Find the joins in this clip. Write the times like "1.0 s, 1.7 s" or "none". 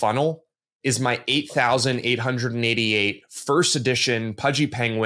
none